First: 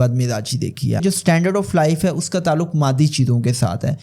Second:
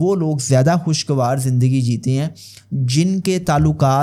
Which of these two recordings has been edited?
first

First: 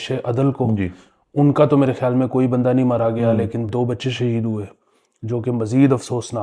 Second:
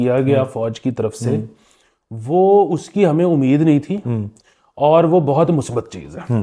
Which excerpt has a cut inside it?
first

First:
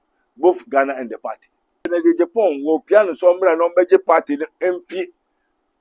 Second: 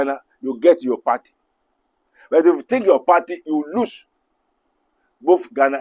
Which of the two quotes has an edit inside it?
first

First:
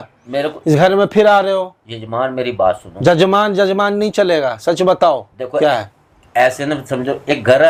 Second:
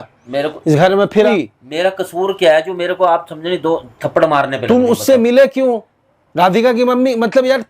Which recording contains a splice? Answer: second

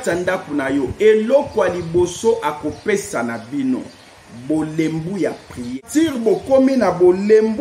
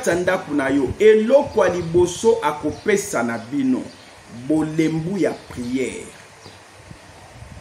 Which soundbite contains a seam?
first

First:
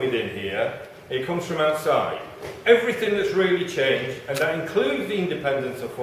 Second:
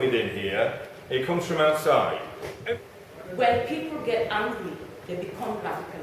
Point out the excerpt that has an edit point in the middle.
second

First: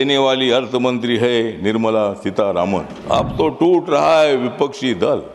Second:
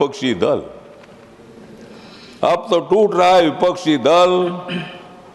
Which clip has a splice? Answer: first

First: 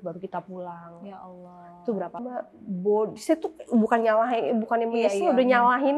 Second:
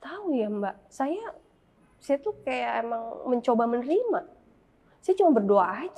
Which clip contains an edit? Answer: first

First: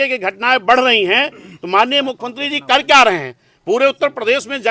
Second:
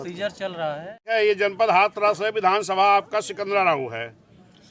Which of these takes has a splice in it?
second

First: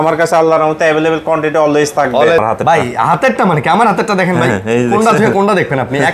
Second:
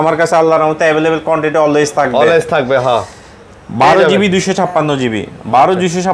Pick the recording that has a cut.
first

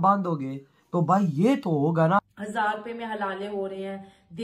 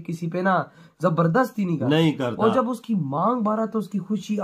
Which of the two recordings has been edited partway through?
first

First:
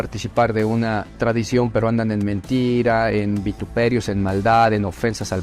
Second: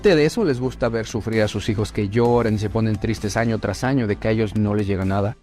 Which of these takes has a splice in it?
first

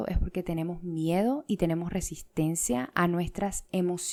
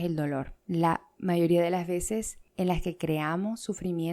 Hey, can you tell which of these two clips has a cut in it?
second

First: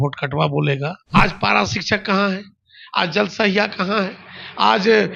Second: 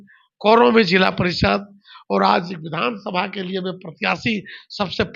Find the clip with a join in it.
first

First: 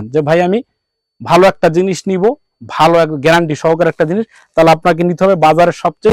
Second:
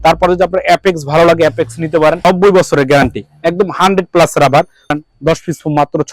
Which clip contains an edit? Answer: second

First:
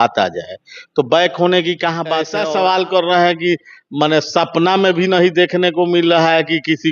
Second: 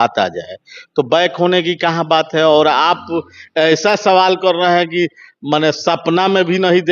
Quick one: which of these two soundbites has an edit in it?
first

